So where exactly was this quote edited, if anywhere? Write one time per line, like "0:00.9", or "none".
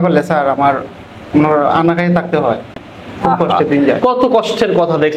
none

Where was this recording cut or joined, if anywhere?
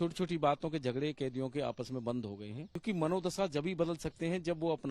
0:02.8

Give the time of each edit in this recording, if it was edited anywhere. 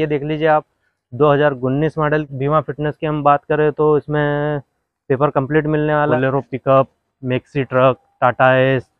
0:02.3
0:06.1

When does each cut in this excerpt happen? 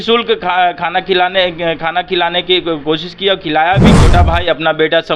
0:03.9

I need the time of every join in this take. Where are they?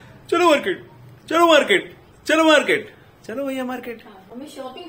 none

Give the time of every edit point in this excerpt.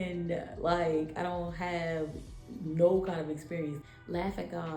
0:03.9

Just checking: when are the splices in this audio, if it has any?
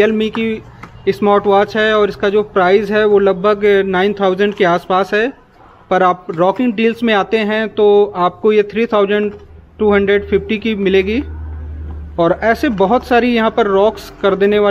none

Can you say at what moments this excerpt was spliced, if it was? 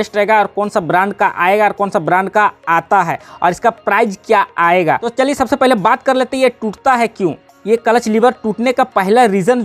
none

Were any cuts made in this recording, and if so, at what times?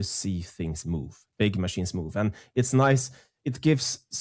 none

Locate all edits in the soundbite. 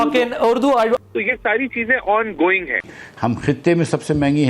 0:01.0

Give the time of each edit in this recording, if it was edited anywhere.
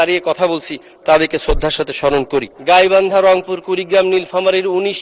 0:02.5

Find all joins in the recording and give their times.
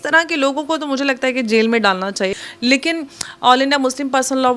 0:02.4

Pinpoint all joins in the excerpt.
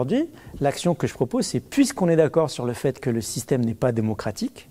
none

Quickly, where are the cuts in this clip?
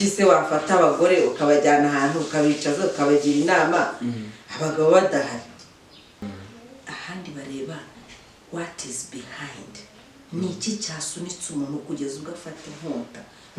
0:06.2

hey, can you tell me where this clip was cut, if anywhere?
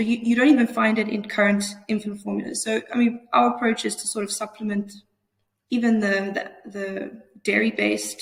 none

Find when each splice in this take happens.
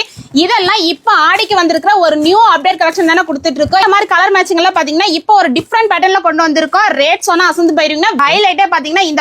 0:03.8
0:08.2

